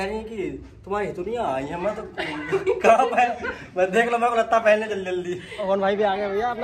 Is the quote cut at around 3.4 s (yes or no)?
no